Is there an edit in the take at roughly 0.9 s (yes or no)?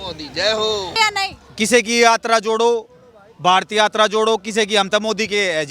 yes